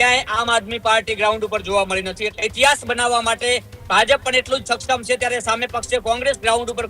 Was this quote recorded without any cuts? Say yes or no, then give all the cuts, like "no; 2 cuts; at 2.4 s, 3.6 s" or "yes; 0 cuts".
no; 1 cut; at 2.3 s